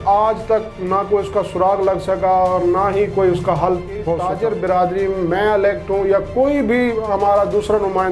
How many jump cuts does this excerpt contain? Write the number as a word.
one